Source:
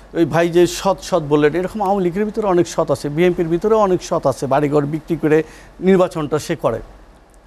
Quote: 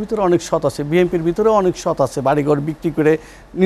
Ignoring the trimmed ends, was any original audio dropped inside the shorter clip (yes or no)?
no